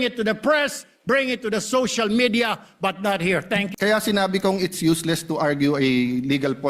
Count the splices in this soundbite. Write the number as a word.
one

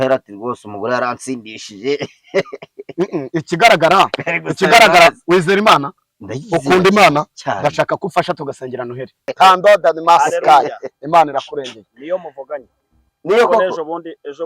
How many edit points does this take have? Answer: one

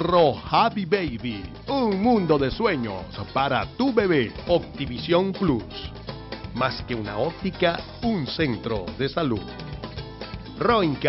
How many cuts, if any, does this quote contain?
one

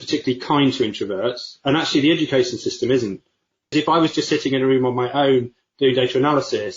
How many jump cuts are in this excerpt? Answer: one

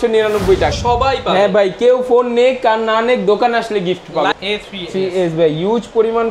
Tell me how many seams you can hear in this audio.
two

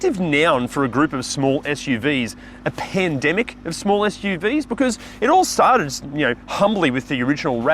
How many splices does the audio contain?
zero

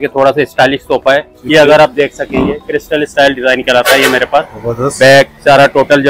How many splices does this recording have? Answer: one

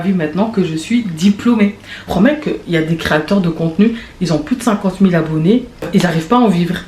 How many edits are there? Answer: two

